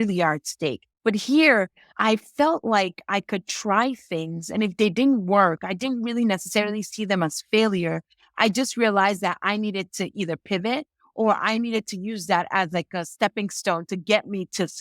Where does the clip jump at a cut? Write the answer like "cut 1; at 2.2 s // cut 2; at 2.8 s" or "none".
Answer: cut 1; at 0.9 s // cut 2; at 1.8 s